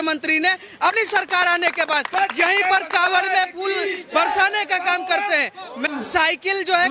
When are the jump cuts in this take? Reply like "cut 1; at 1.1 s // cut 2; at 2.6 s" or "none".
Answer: cut 1; at 0.9 s // cut 2; at 5.8 s